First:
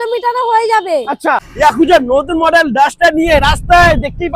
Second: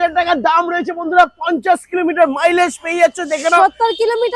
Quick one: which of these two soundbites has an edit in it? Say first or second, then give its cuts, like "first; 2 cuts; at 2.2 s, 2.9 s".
first; 1 cut; at 1.5 s